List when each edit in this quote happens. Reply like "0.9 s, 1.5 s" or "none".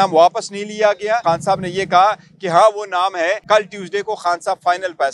1.2 s, 3.4 s